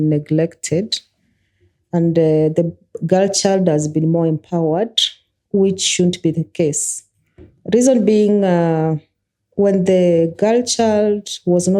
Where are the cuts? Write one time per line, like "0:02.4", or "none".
none